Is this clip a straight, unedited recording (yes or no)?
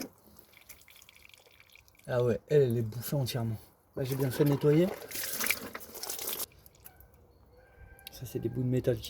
no